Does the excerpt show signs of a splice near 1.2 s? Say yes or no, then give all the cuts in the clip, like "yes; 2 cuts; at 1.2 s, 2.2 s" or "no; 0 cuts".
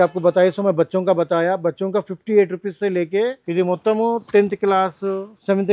no; 1 cut; at 3.4 s